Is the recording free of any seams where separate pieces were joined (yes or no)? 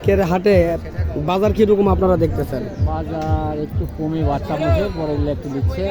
yes